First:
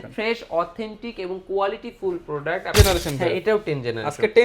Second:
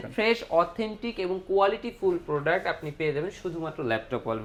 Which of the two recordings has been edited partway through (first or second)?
first